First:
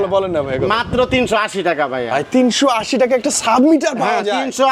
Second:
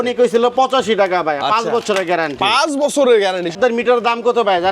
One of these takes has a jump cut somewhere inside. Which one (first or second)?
second